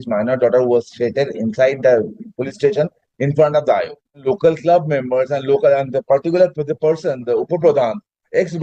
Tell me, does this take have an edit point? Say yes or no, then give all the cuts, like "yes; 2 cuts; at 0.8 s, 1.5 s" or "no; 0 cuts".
yes; 1 cut; at 4.2 s